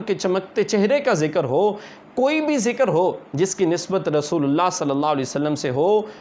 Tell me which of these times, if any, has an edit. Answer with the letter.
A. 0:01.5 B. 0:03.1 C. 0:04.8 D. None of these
D